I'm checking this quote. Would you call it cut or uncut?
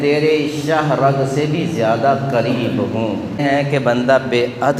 cut